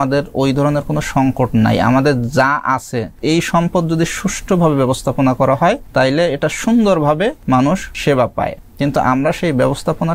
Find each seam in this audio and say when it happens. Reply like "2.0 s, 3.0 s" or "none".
3.2 s, 5.8 s, 7.8 s, 8.6 s